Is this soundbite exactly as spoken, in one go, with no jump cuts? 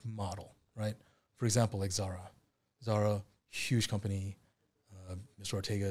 yes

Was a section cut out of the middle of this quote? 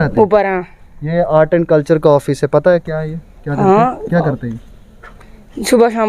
no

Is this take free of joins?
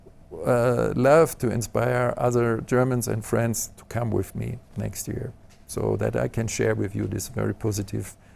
yes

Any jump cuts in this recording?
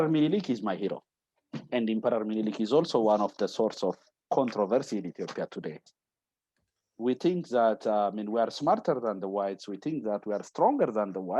yes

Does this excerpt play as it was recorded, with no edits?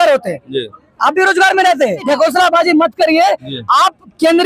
no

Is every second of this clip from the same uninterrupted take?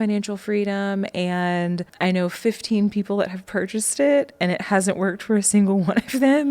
no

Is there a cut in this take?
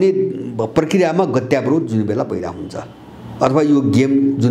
no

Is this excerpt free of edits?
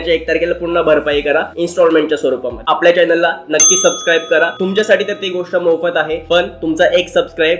no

